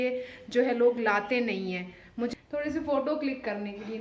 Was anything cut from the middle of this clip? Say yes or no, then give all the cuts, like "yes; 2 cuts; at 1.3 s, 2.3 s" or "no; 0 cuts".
yes; 1 cut; at 2.3 s